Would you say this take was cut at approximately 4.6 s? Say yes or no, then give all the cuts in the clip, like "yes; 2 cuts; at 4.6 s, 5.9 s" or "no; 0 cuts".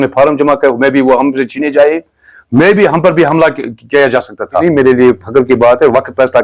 yes; 1 cut; at 4.6 s